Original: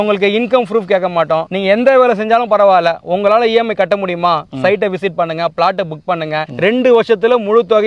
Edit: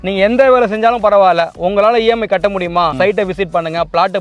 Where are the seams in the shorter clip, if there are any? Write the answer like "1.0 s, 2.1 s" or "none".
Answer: 2.9 s